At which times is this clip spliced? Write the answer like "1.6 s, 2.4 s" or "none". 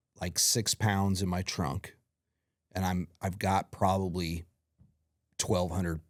none